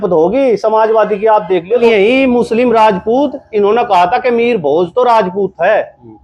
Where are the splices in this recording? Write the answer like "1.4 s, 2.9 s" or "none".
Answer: 1.8 s